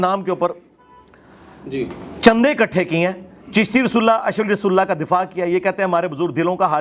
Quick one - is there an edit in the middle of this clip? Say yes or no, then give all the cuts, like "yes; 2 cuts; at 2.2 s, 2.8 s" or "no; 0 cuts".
no; 0 cuts